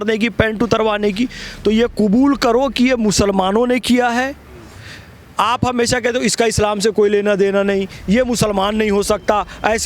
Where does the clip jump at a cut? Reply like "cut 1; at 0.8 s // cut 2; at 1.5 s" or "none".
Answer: none